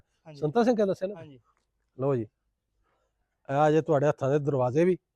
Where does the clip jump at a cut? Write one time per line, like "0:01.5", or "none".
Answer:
none